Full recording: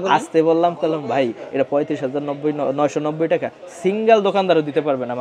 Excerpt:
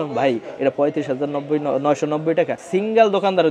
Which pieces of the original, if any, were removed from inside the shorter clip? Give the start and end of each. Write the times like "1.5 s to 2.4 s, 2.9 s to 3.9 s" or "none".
3.5 s to 3.7 s